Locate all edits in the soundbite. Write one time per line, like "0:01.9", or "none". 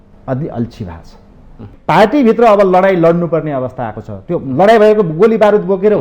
0:01.7